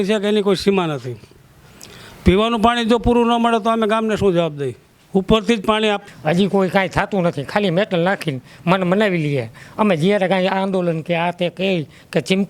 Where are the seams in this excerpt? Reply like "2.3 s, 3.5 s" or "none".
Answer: 6.0 s